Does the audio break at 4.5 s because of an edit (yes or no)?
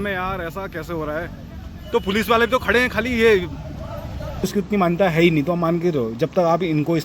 yes